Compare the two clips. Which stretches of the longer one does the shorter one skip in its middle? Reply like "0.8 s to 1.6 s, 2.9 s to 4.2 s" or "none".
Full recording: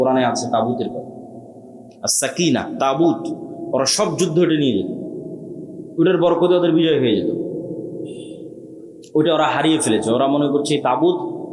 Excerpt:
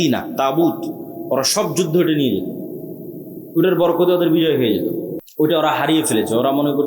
7.6 s to 8.9 s

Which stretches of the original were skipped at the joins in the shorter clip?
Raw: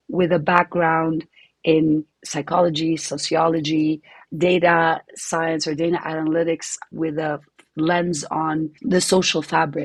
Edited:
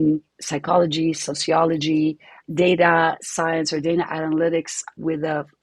5.1 s to 5.2 s

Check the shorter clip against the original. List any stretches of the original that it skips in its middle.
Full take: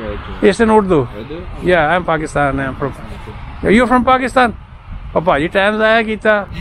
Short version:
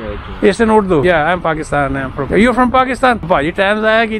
1.0 s to 1.7 s, 2.8 s to 3.5 s, 4.6 s to 5.2 s

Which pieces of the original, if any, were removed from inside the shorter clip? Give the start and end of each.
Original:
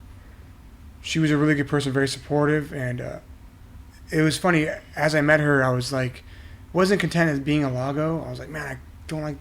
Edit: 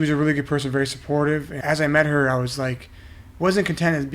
2.7 s to 4.9 s

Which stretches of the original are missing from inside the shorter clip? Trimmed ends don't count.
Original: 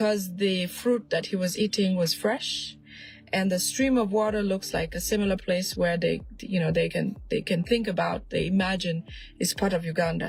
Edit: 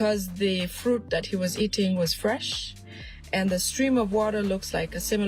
none

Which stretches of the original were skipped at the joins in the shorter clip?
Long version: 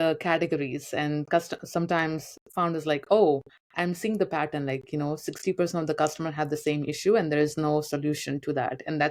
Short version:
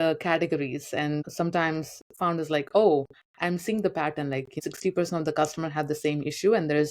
1.2 s to 1.6 s, 4.9 s to 5.2 s

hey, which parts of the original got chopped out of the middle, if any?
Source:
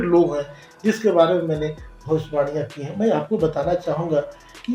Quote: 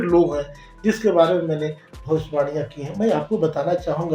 none

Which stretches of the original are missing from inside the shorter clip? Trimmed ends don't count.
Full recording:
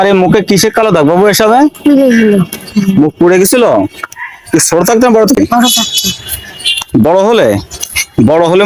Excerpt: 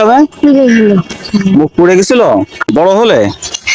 4.1 s to 7.0 s

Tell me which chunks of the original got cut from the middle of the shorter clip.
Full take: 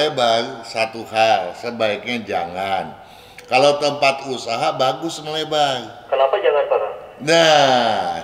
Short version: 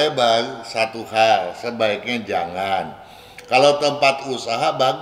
none

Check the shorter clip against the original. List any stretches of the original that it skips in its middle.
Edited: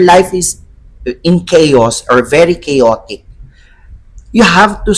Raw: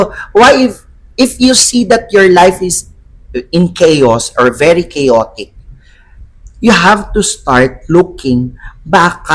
none

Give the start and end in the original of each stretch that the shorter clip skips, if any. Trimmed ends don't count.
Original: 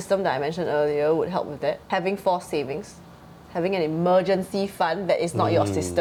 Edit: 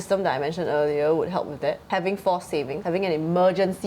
2.8 s to 3.5 s

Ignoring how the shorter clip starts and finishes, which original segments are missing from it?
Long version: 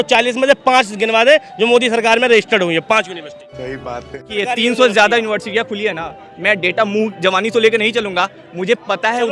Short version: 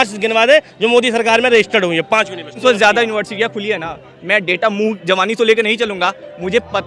3.4 s to 4.7 s

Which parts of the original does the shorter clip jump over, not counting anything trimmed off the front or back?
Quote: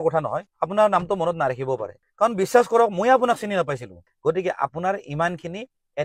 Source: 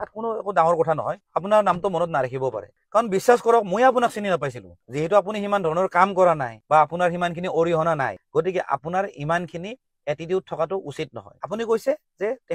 4.8 s to 8.2 s

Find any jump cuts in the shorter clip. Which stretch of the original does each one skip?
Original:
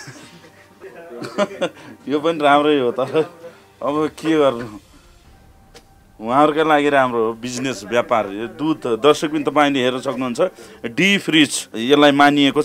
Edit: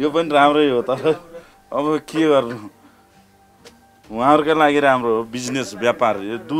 none

